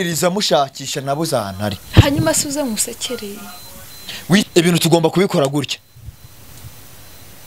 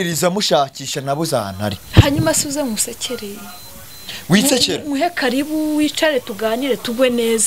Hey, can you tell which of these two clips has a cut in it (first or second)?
first